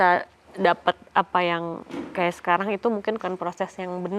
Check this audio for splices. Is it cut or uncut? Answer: cut